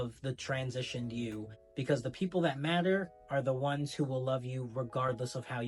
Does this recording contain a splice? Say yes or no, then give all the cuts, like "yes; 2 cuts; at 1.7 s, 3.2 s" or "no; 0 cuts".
no; 0 cuts